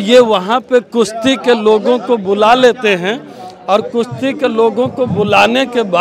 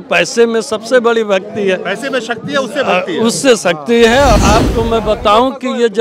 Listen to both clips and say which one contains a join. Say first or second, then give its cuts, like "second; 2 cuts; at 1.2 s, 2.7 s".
second; 1 cut; at 4.3 s